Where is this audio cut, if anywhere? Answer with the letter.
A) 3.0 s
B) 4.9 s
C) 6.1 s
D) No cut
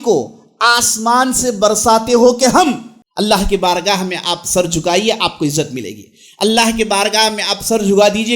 A